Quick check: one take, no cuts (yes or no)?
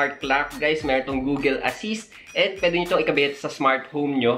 yes